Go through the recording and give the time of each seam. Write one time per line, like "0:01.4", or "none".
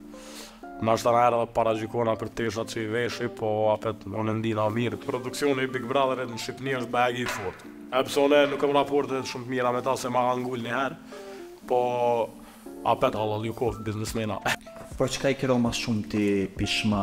0:05.0
0:14.6